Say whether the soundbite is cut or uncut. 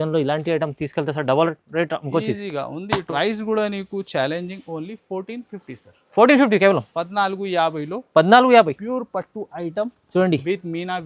cut